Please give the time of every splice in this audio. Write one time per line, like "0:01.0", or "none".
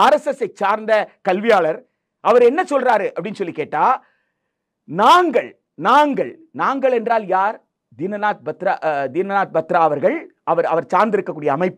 none